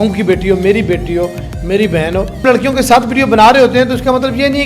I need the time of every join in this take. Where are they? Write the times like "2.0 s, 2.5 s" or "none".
2.4 s